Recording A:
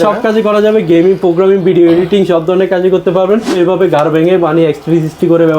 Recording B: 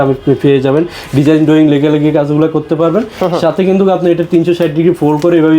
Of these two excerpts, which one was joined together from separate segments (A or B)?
A